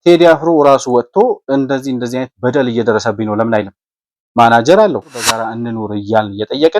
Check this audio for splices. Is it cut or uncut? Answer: cut